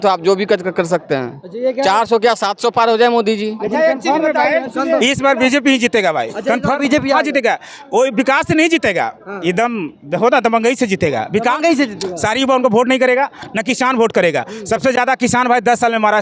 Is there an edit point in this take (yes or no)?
no